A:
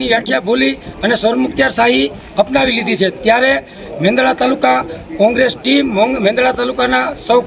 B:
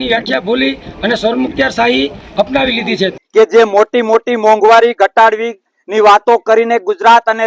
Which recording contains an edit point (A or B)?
B